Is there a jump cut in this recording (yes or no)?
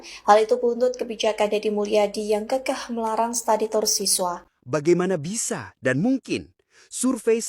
yes